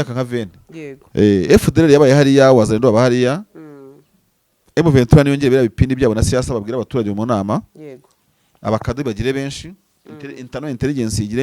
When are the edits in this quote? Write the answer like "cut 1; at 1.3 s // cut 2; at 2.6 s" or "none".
cut 1; at 1.0 s